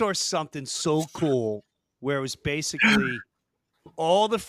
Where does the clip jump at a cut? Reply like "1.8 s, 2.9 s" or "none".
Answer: none